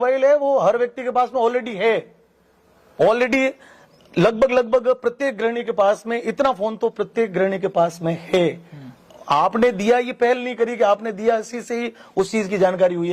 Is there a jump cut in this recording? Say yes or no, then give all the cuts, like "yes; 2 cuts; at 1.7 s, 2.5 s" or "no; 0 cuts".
no; 0 cuts